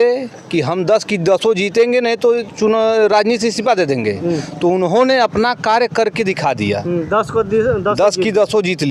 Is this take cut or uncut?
uncut